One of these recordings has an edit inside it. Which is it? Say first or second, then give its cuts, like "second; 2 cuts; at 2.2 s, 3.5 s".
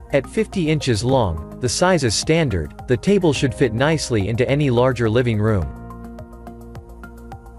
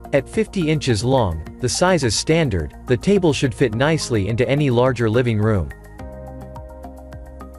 first; 1 cut; at 5.7 s